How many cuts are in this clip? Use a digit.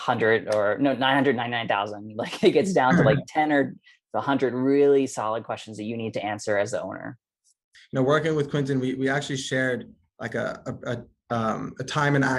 1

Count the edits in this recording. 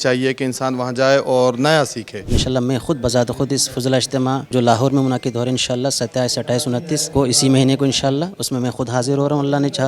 3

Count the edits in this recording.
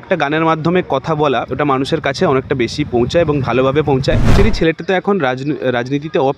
2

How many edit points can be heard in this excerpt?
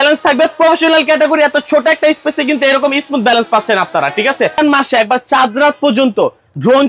1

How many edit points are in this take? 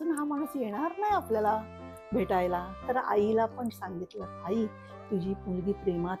1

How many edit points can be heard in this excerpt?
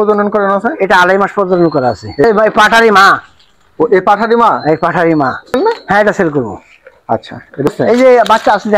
3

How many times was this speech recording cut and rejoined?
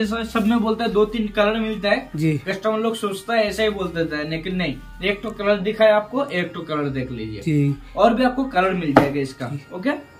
0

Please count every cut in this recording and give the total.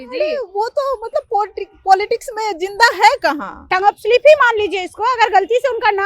1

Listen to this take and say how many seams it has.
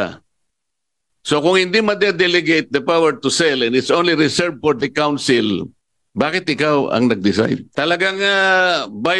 1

